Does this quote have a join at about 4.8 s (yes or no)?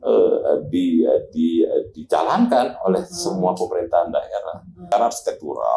yes